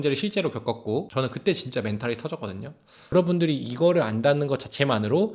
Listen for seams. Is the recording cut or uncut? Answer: cut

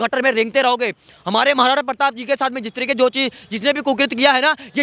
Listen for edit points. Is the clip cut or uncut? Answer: uncut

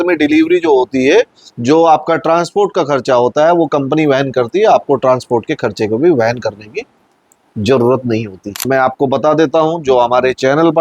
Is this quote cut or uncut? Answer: cut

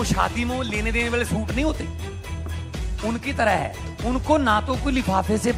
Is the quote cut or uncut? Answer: uncut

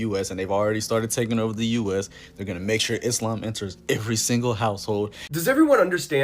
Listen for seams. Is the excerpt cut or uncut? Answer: cut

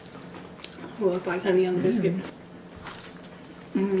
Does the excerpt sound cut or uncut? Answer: cut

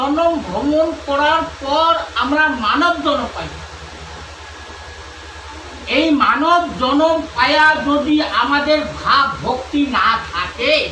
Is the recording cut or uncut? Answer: uncut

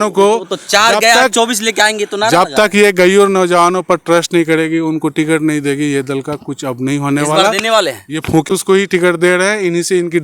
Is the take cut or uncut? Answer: cut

